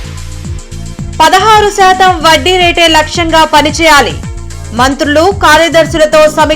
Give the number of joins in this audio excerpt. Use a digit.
1